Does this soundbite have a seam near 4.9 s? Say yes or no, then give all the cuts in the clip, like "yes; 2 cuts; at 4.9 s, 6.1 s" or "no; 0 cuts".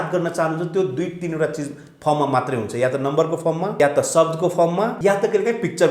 yes; 2 cuts; at 3.7 s, 4.9 s